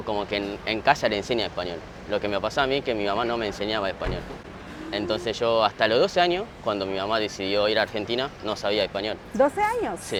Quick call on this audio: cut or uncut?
uncut